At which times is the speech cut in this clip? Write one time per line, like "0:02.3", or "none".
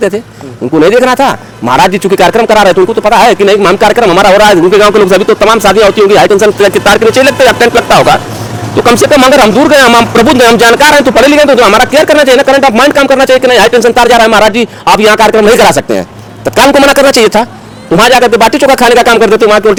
none